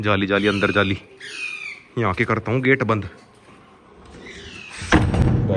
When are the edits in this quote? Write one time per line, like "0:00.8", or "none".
none